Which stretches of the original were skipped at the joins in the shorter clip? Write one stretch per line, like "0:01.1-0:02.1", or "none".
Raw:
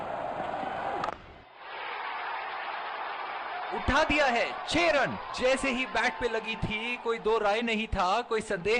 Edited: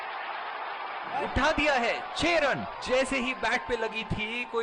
0:03.7-0:03.8